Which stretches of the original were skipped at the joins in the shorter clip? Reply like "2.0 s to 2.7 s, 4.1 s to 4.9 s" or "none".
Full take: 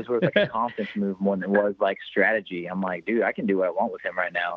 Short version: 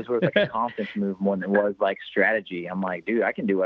none